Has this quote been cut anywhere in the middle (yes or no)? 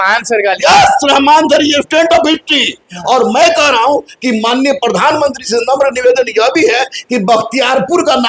no